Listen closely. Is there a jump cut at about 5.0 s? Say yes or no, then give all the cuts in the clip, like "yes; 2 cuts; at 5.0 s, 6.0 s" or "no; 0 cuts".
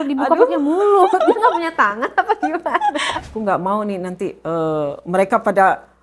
no; 1 cut; at 3.2 s